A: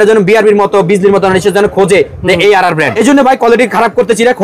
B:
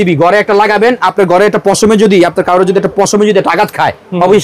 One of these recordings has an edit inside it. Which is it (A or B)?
A